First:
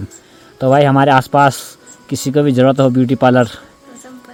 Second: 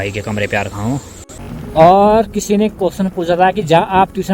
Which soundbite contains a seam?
second; 1 cut; at 1.4 s

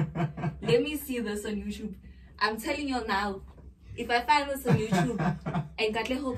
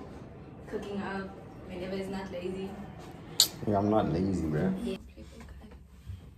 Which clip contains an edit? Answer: second; 1 cut; at 5.0 s

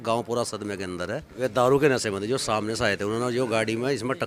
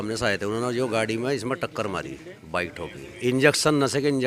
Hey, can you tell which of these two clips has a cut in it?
first; 1 cut; at 1.2 s

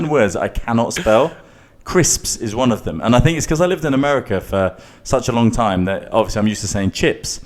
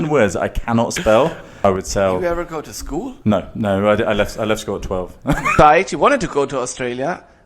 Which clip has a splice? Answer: second; 2 cuts; at 1.6 s, 5.5 s

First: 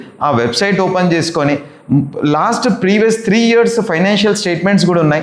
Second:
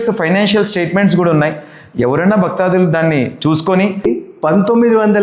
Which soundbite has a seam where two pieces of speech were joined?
second; 1 cut; at 4.0 s

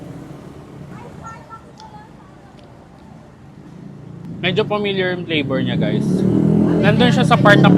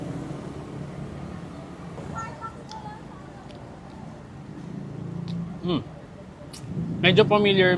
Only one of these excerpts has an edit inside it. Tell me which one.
first; 2 cuts; at 1.0 s, 4.3 s

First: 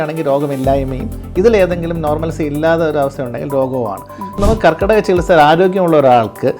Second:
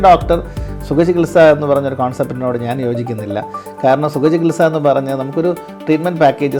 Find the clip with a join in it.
first; 1 cut; at 4.4 s

